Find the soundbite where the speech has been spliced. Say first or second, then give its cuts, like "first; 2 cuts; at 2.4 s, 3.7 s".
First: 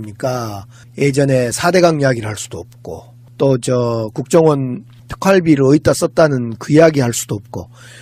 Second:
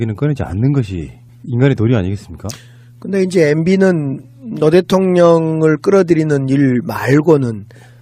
second; 1 cut; at 3.3 s